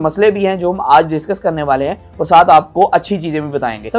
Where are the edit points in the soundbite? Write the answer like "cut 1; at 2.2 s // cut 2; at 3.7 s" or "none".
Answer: none